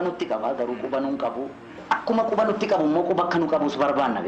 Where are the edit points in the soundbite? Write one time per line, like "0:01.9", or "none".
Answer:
0:01.7